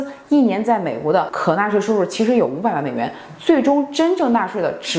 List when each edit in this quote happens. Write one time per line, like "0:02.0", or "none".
0:01.3